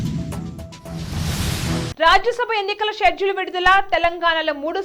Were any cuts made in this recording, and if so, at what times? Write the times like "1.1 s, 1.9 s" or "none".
1.9 s